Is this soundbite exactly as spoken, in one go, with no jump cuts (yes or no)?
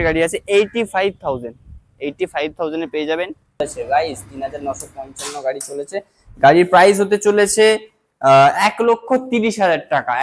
no